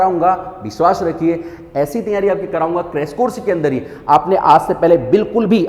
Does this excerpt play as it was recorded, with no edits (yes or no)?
yes